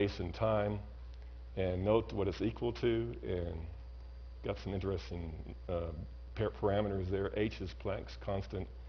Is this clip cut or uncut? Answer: uncut